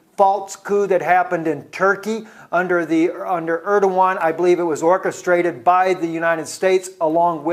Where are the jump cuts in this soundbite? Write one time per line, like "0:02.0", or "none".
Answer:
none